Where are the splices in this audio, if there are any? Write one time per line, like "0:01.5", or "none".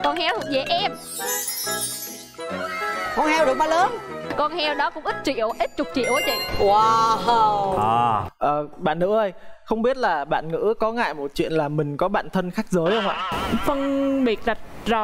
0:08.3